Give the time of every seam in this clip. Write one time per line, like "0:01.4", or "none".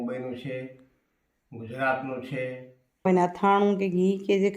0:03.1